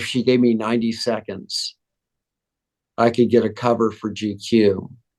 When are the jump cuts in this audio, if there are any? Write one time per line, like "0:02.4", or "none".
none